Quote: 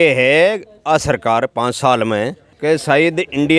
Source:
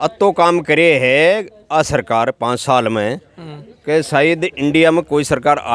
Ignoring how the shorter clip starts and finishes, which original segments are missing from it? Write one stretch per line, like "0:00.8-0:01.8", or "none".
0:03.3-0:03.7